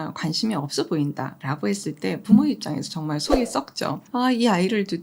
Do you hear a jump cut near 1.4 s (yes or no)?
yes